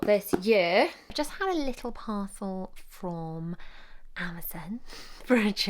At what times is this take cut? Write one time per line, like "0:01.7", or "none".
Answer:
0:01.1